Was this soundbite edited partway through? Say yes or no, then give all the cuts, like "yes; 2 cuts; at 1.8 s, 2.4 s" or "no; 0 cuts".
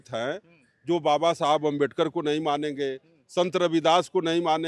no; 0 cuts